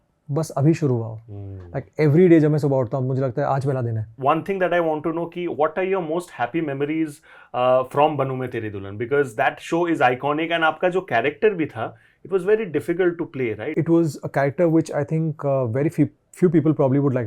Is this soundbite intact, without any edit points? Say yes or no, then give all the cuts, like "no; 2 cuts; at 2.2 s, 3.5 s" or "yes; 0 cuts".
no; 2 cuts; at 4.2 s, 13.7 s